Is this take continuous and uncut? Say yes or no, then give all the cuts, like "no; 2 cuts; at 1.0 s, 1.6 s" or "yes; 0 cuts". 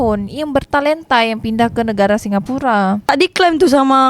no; 1 cut; at 3.0 s